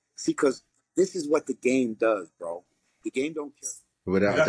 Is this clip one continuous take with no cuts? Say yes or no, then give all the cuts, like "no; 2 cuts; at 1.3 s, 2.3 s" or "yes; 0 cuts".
no; 1 cut; at 3.5 s